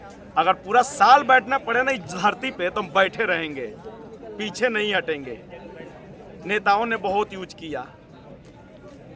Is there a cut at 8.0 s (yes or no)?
no